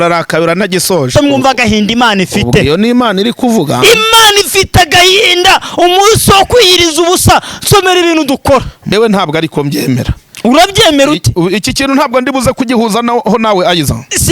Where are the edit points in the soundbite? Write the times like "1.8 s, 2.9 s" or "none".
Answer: 1.2 s, 8.8 s

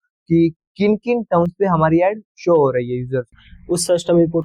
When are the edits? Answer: 3.3 s

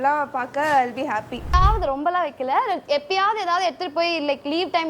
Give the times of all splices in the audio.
1.5 s

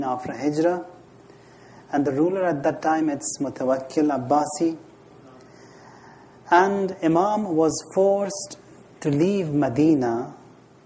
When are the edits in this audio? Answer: 6.6 s

